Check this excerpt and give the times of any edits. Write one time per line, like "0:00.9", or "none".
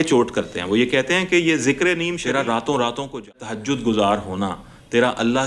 0:02.2
0:03.4